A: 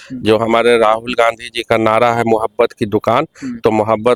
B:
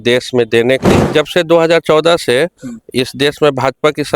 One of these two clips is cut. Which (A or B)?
B